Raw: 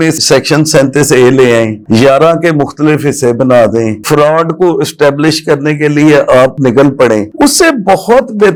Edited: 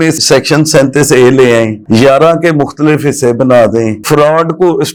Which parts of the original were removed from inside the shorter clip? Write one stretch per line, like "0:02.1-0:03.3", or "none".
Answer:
none